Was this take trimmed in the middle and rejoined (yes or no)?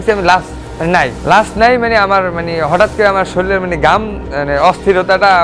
no